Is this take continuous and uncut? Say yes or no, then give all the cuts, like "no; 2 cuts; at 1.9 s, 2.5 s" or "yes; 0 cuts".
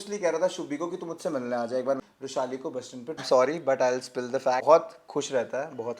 no; 3 cuts; at 2.0 s, 3.2 s, 4.6 s